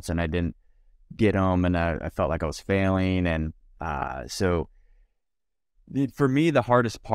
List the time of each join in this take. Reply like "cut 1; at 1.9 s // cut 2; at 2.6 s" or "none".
none